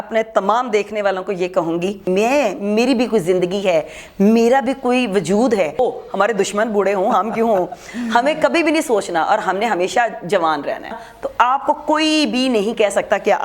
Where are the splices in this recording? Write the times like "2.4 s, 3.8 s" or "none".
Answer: 2.0 s, 5.8 s, 10.9 s